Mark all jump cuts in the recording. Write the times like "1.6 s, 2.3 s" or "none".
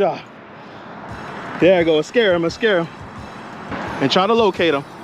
3.7 s